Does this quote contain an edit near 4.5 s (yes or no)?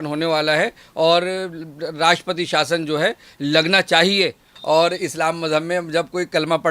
yes